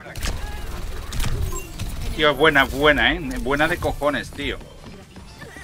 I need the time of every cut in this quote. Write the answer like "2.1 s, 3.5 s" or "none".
none